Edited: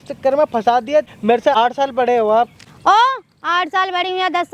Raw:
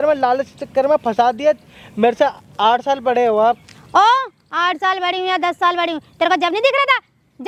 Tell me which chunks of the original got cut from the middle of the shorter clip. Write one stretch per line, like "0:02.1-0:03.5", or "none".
0:01.9-0:02.4